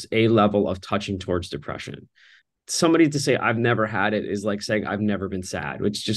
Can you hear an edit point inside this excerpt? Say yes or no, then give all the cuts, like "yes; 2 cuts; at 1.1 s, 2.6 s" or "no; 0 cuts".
yes; 1 cut; at 2.3 s